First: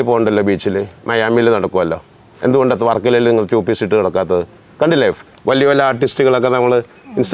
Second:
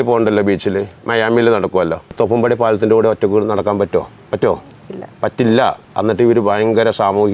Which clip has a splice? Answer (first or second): second